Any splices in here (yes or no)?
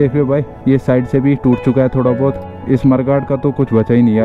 yes